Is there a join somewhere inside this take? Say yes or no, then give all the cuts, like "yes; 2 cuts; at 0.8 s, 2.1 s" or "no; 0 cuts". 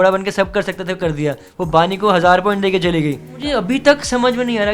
yes; 2 cuts; at 1.5 s, 3.3 s